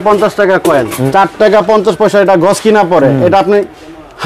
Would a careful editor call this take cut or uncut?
cut